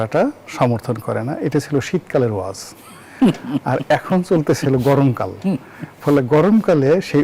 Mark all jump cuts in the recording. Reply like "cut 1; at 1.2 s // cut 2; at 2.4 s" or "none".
none